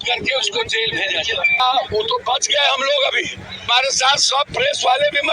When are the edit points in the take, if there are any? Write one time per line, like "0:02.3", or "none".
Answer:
0:01.6
0:03.7